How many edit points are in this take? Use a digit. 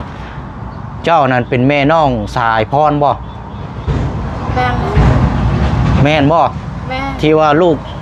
0